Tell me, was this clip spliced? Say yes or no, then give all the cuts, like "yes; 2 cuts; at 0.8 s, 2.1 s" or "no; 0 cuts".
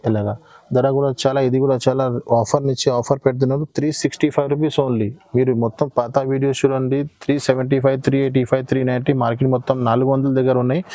no; 0 cuts